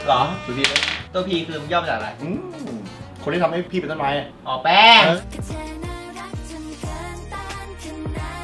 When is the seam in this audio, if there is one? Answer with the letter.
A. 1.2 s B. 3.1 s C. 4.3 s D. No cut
D